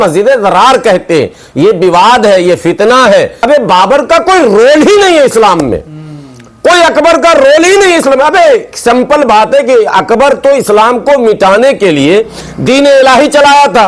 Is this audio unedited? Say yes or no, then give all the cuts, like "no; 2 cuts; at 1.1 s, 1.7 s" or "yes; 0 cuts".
no; 1 cut; at 3.4 s